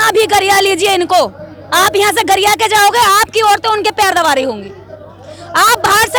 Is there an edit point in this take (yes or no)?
no